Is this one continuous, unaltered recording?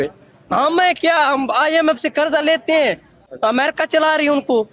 no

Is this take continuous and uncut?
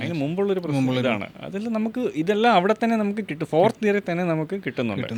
yes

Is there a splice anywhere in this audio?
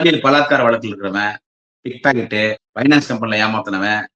yes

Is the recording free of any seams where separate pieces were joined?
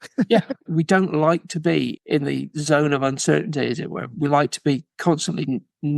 yes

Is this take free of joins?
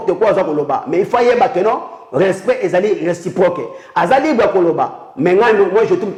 yes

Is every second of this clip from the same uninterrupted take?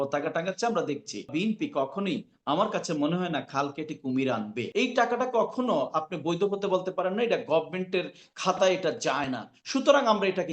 no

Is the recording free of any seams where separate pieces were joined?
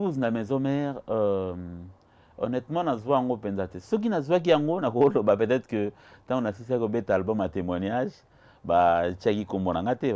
yes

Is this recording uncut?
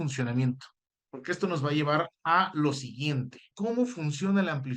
no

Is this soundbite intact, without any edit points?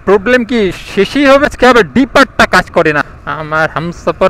no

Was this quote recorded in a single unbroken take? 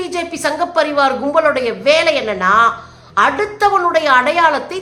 yes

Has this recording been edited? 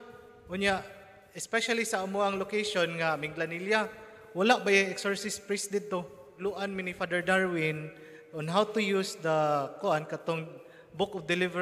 yes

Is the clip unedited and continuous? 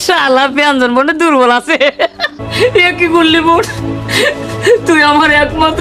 no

